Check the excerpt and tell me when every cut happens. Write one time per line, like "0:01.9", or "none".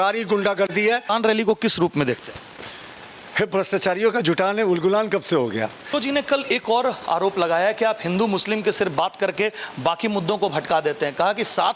0:01.1
0:05.8